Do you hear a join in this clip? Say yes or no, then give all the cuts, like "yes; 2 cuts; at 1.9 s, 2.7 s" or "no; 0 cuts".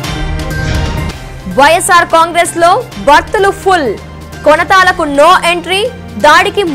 yes; 1 cut; at 1.1 s